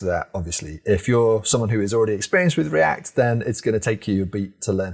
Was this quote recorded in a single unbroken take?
yes; 0 cuts

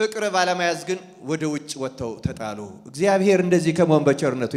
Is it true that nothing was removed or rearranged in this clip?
yes; 0 cuts

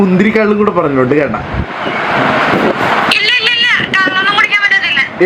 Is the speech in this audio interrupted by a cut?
no; 0 cuts

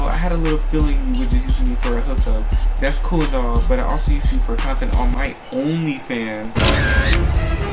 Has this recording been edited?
no; 0 cuts

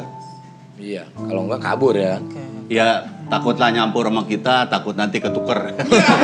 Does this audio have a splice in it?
no; 0 cuts

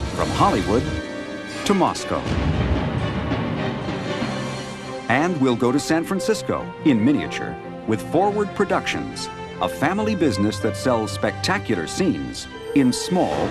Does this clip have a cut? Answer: yes; 1 cut; at 9.1 s

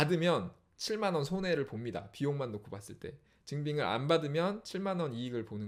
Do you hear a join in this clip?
no; 0 cuts

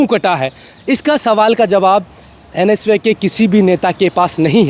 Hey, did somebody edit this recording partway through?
no; 0 cuts

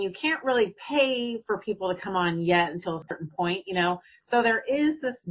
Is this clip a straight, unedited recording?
no; 1 cut; at 3.1 s

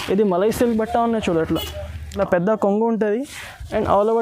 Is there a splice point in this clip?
yes; 1 cut; at 2.0 s

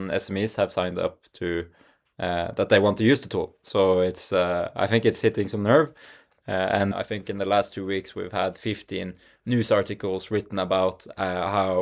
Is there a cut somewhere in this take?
yes; 1 cut; at 6.9 s

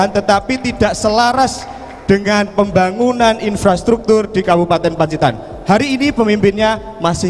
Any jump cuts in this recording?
no; 0 cuts

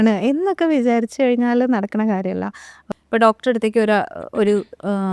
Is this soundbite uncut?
yes; 0 cuts

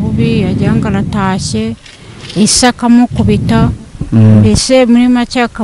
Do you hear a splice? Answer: no; 0 cuts

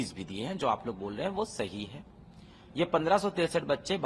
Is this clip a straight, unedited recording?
yes; 0 cuts

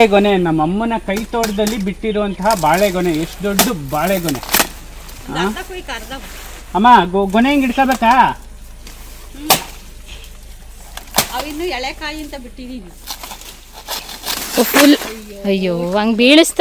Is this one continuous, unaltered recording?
yes; 0 cuts

